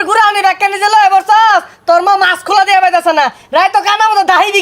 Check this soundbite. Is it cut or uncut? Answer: uncut